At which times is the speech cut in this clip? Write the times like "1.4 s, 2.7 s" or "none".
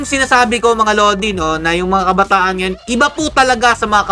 none